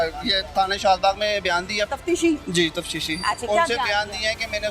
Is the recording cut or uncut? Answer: cut